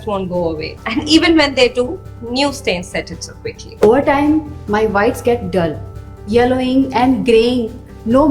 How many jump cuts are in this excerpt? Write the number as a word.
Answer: one